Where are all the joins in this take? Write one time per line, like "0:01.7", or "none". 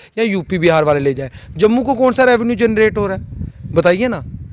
none